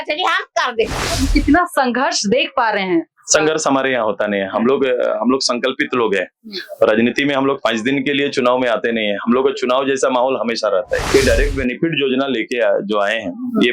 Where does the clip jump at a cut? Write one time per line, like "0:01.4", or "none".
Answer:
0:01.0
0:11.0